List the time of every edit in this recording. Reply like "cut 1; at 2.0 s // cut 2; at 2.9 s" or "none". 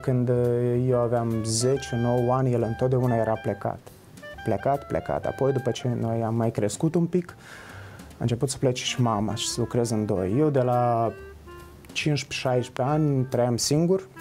none